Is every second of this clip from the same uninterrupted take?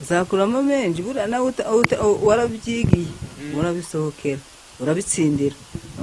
yes; 0 cuts

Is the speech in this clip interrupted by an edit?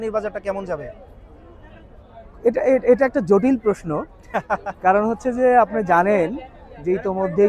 no; 0 cuts

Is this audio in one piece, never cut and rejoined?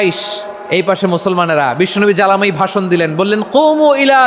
yes; 0 cuts

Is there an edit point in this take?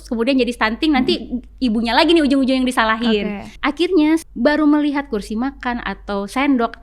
yes; 2 cuts; at 3.5 s, 4.2 s

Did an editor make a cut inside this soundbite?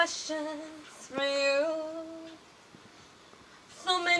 no; 0 cuts

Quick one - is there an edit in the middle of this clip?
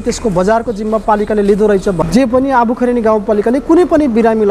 yes; 1 cut; at 2.0 s

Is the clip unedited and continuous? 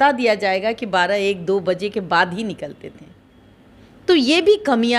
yes; 0 cuts

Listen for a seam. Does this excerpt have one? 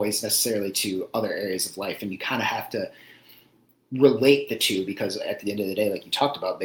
no; 0 cuts

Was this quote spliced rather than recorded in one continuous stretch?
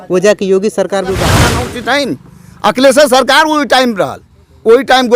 yes; 1 cut; at 1.5 s

